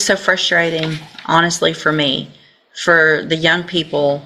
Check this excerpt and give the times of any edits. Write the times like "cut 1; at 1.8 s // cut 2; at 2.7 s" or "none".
none